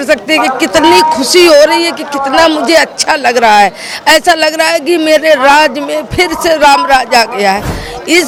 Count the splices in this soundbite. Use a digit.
0